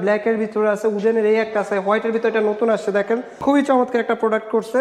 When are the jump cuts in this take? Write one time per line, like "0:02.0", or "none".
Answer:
0:03.3